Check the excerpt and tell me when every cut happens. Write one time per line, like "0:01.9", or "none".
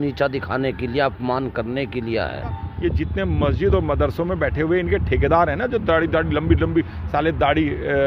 0:02.7